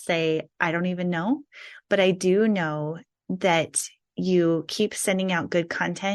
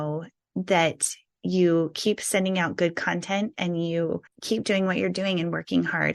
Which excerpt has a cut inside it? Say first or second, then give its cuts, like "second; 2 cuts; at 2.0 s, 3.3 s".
second; 1 cut; at 4.3 s